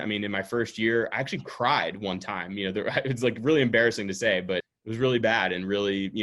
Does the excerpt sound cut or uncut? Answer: cut